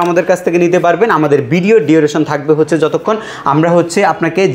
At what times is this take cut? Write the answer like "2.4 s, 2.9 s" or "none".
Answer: none

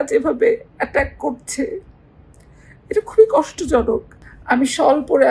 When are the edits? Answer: 4.2 s

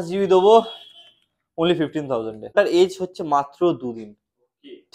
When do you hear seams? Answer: 2.5 s

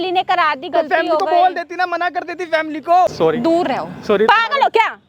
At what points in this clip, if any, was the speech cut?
3.1 s

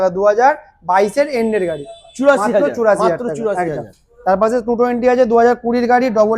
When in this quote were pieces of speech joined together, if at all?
none

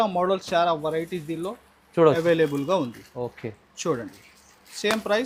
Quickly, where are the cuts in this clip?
none

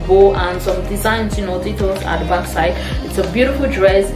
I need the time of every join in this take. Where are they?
none

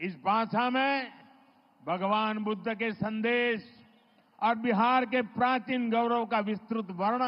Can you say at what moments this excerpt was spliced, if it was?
none

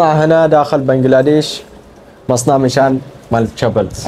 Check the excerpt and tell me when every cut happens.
none

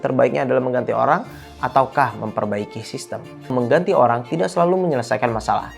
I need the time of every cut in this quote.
3.5 s

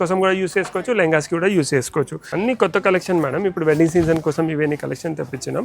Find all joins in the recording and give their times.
2.2 s

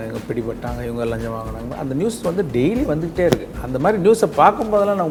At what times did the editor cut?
none

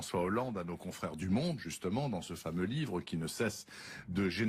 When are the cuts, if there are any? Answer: 2.7 s

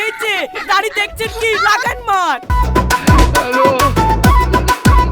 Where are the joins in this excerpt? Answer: 2.5 s

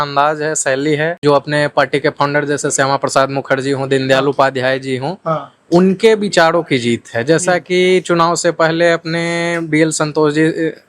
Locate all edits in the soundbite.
1.2 s

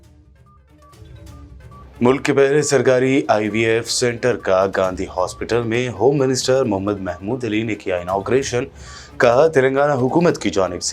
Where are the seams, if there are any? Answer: 1.2 s

